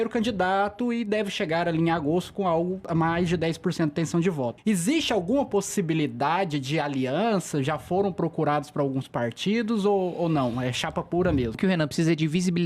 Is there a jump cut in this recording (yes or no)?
yes